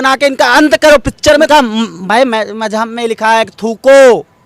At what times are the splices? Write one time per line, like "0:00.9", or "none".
0:01.5